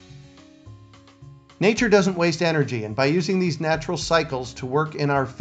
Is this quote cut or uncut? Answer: cut